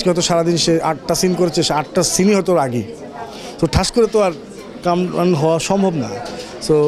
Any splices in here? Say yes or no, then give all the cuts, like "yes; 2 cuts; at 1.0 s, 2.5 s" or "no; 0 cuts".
no; 0 cuts